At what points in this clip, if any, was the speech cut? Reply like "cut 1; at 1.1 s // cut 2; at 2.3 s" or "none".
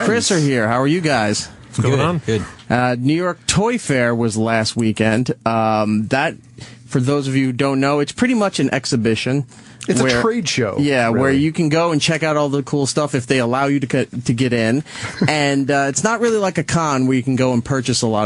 none